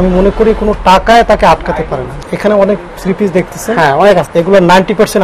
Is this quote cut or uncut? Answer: cut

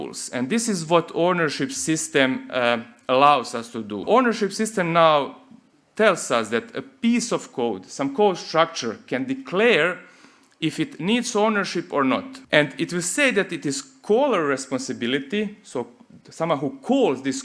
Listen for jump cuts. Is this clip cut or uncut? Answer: cut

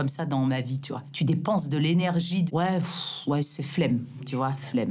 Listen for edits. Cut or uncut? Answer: uncut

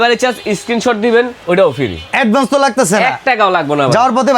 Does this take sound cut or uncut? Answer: cut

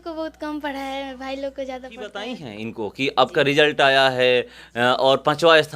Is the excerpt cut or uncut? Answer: cut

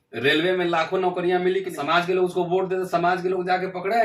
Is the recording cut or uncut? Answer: cut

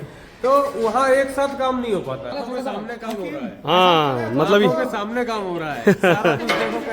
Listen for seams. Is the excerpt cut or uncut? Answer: cut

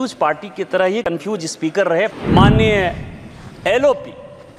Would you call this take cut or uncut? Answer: cut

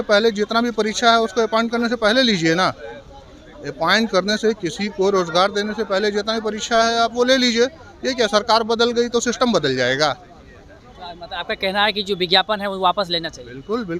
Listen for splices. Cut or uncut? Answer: uncut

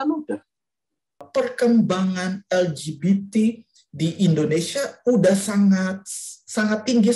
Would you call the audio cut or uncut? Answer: cut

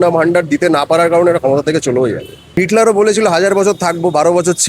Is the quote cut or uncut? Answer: cut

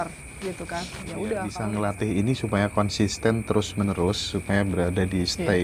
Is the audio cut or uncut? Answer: cut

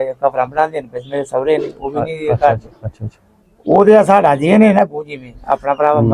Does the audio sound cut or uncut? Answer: uncut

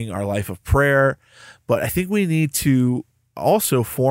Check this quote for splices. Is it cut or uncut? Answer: uncut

